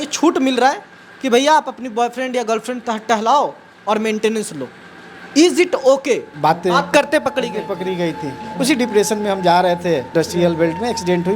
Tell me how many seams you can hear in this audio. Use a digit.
2